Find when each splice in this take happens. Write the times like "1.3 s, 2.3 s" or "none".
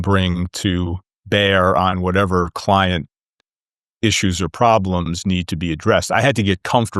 none